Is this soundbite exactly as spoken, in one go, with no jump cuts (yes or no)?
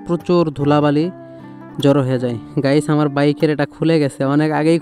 yes